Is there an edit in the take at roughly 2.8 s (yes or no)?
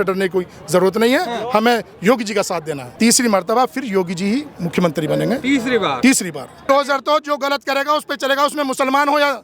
yes